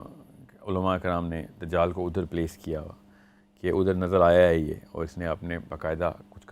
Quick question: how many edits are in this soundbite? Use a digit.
0